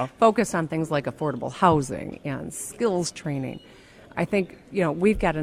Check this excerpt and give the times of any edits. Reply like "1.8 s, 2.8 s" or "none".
4.1 s